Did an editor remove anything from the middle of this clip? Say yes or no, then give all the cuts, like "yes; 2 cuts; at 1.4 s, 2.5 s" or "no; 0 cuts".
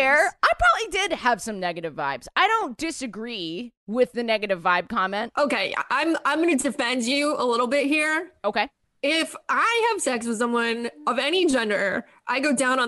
yes; 1 cut; at 5.3 s